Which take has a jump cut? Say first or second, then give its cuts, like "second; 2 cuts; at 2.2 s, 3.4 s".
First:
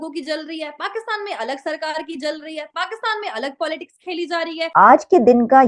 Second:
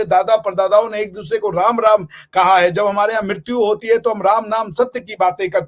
first; 1 cut; at 4.7 s